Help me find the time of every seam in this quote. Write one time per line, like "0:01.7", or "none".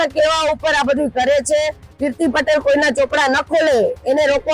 0:01.8